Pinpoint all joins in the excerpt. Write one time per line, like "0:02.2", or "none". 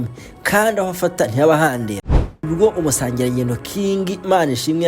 0:02.4